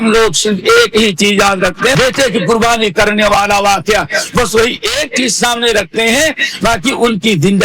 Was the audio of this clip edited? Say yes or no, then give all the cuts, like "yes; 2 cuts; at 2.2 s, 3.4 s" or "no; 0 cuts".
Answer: yes; 1 cut; at 2.0 s